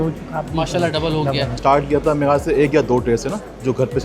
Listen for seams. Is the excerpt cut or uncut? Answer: cut